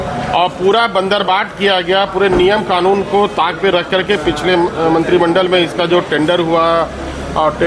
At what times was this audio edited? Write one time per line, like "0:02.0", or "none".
none